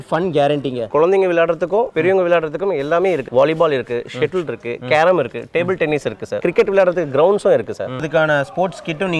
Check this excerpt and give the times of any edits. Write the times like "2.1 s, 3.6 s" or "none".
0.9 s, 3.2 s, 6.4 s, 8.1 s